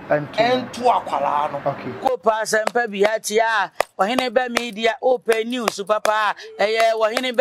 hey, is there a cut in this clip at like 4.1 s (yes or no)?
no